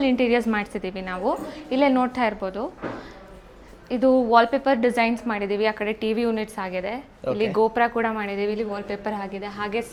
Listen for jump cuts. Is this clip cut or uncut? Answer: uncut